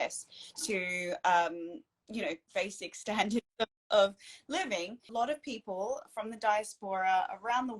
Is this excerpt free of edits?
no; 1 cut; at 5.1 s

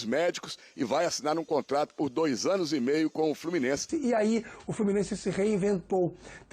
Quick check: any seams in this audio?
yes; 1 cut; at 3.9 s

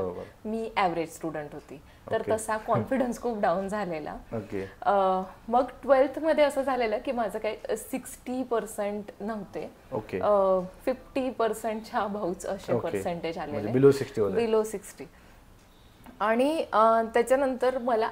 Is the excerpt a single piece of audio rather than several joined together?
yes; 0 cuts

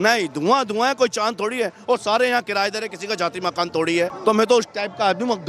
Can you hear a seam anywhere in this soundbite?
yes; 1 cut; at 4.1 s

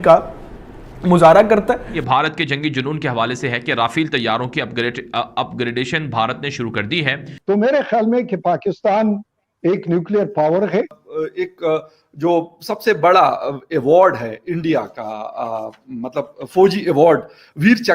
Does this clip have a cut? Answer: yes; 3 cuts; at 1.9 s, 7.3 s, 11.0 s

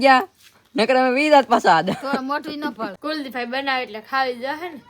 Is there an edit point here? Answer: yes; 1 cut; at 2.9 s

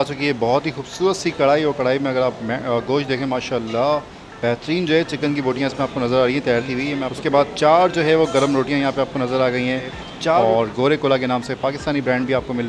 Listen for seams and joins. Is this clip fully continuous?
no; 2 cuts; at 7.1 s, 10.3 s

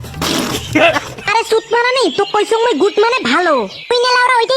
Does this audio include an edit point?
yes; 1 cut; at 1.2 s

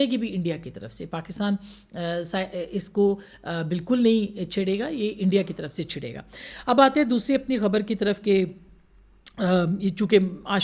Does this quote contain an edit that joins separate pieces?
no; 0 cuts

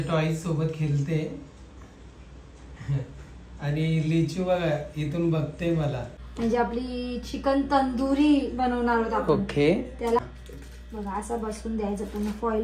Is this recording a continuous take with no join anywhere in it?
no; 2 cuts; at 6.1 s, 10.2 s

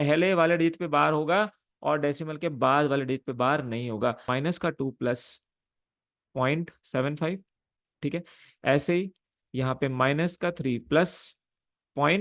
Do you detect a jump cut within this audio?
yes; 1 cut; at 4.2 s

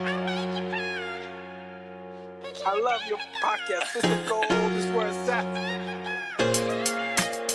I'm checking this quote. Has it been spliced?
yes; 1 cut; at 1.5 s

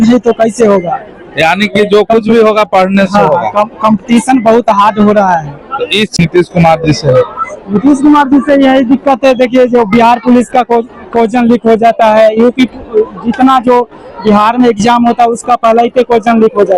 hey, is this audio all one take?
no; 1 cut; at 6.1 s

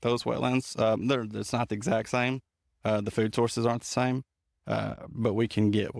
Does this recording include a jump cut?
no; 0 cuts

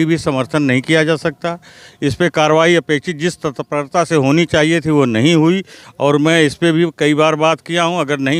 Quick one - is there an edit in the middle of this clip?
no; 0 cuts

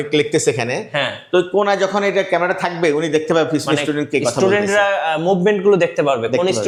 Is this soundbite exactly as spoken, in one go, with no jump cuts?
yes; 0 cuts

